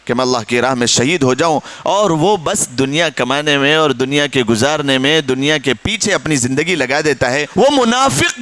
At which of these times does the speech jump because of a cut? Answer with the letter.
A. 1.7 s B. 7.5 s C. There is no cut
B